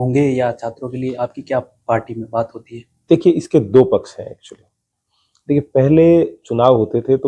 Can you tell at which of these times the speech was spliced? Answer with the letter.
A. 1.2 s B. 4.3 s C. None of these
C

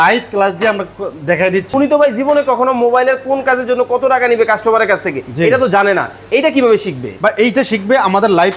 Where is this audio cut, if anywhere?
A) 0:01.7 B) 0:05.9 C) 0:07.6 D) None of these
A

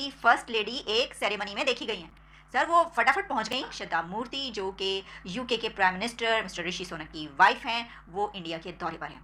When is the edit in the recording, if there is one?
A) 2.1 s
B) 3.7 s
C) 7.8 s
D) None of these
D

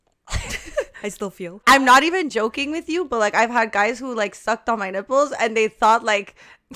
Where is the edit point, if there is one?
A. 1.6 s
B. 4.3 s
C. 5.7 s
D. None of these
A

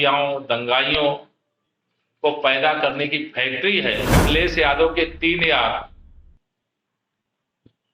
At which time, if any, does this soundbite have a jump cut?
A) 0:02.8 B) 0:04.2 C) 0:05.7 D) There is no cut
B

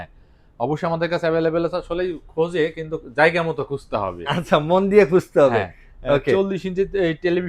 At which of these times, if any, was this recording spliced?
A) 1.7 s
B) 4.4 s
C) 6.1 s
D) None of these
D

